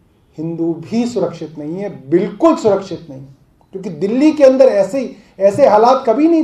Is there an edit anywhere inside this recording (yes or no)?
no